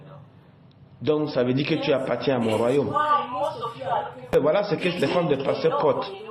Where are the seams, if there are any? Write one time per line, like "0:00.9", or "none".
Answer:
0:04.3